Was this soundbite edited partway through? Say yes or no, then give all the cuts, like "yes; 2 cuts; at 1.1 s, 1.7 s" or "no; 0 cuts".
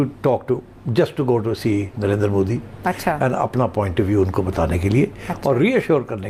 no; 0 cuts